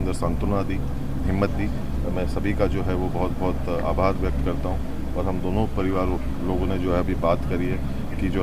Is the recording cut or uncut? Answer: uncut